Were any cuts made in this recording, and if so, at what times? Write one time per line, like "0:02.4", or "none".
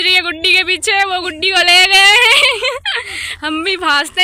none